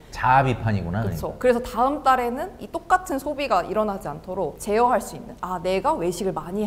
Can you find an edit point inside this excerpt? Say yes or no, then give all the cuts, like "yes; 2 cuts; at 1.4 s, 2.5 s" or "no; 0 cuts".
no; 0 cuts